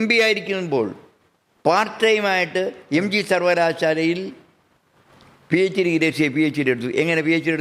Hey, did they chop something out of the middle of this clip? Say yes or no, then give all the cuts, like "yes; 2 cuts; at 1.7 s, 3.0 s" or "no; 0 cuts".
no; 0 cuts